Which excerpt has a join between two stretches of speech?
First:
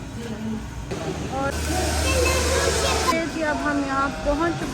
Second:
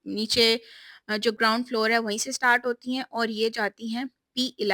first; 1 cut; at 1.5 s

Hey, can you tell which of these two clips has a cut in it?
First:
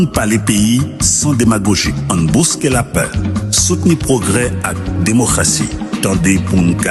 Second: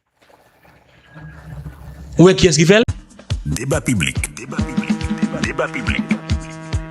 second; 1 cut; at 2.9 s

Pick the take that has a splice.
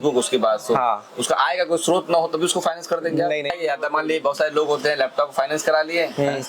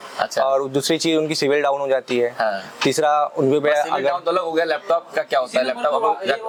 first; 1 cut; at 3.5 s

